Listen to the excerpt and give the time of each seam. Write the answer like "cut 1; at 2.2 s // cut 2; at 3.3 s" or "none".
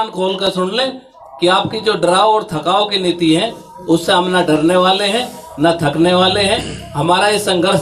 none